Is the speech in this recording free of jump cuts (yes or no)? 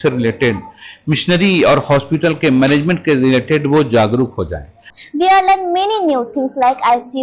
no